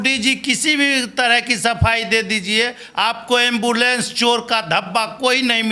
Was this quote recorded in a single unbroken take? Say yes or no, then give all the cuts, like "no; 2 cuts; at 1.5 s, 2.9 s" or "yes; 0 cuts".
yes; 0 cuts